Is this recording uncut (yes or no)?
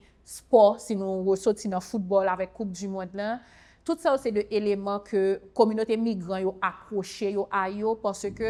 yes